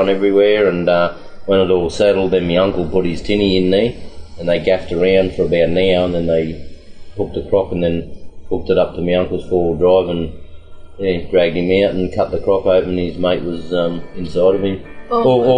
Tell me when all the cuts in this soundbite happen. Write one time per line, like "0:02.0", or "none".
0:14.1